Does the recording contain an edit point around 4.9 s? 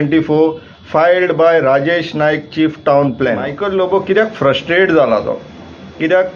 no; 1 cut; at 3.7 s

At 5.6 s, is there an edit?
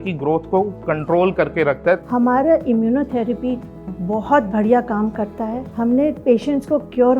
yes; 2 cuts; at 2.0 s, 5.6 s

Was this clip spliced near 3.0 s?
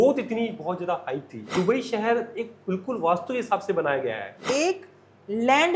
no; 2 cuts; at 1.4 s, 4.4 s

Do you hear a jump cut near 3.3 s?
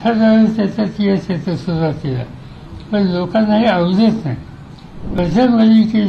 no; 1 cut; at 5.2 s

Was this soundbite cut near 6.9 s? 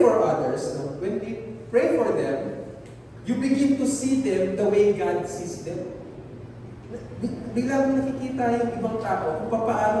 no; 0 cuts

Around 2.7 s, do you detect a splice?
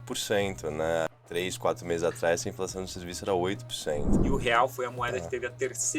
no; 2 cuts; at 1.1 s, 4.1 s

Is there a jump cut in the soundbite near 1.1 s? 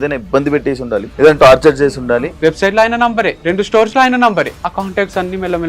yes; 4 cuts; at 1.1 s, 2.3 s, 3.4 s, 4.6 s

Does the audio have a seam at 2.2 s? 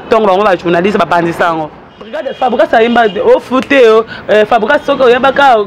yes; 1 cut; at 2.2 s

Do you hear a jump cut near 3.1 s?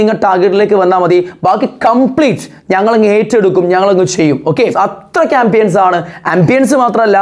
no; 1 cut; at 4.6 s

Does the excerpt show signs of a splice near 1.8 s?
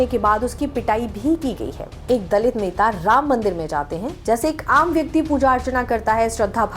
yes; 1 cut; at 1.8 s

